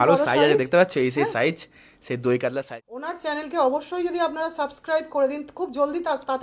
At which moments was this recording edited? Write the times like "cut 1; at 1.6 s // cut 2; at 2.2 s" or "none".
cut 1; at 2.9 s